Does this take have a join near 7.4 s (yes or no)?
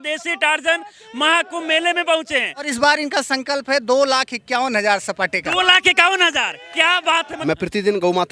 yes